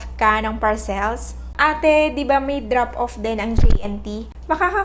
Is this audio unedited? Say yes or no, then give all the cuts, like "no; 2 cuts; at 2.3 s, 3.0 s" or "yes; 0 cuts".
no; 1 cut; at 1.5 s